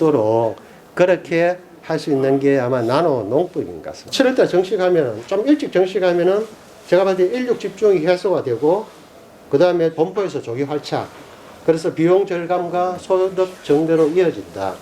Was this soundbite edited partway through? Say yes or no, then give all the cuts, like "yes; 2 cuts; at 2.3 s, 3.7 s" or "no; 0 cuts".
yes; 1 cut; at 4.0 s